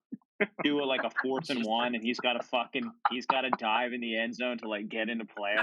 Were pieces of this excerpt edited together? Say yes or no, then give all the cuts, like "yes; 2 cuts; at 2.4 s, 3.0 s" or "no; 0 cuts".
no; 0 cuts